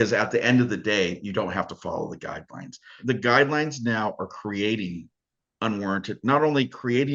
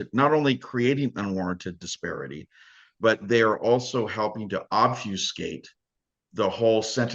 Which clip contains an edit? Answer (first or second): first